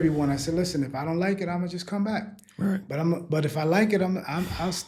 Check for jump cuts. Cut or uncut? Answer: uncut